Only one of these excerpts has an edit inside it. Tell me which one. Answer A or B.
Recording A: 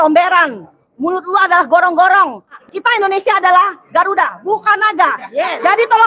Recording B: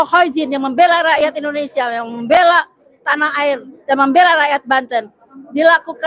A